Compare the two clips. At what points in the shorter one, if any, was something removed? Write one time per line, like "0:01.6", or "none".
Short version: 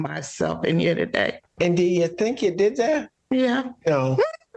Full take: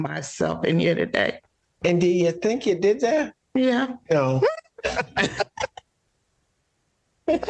0:01.4